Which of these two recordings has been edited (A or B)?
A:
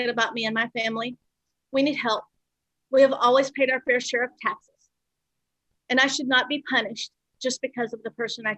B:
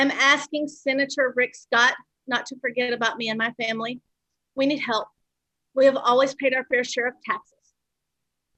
A